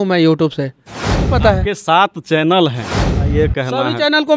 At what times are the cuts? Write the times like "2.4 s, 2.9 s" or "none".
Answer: 1.2 s, 3.1 s